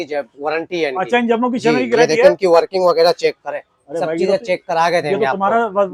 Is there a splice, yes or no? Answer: no